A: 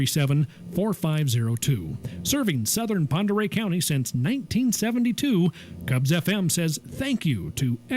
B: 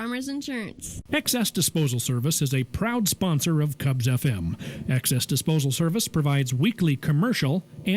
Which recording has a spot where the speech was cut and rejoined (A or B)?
B